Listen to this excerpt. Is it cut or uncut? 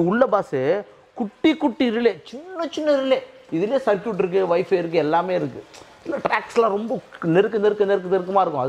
uncut